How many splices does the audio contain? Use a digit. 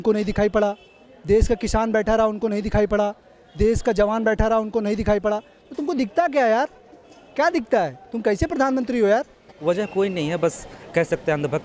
1